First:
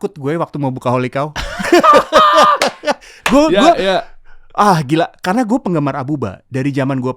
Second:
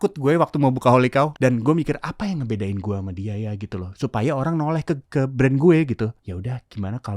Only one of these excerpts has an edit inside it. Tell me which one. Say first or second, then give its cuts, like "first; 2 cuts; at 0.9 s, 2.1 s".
second; 3 cuts; at 1.3 s, 5.0 s, 6.2 s